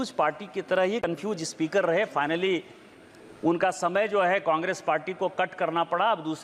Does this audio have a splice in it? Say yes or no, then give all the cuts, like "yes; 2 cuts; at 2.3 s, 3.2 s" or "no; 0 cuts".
no; 0 cuts